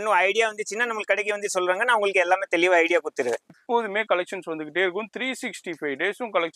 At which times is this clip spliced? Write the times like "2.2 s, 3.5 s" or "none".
3.5 s